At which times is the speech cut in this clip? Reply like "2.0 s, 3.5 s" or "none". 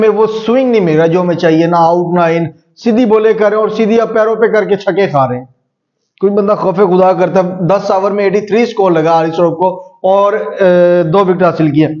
none